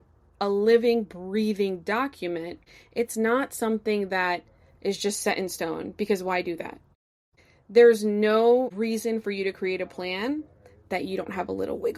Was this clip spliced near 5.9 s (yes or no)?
no